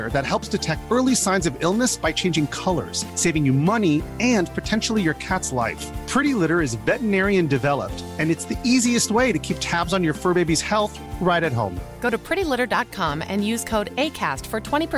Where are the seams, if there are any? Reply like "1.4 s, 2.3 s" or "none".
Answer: none